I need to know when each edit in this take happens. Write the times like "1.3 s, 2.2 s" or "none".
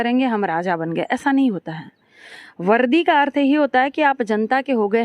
none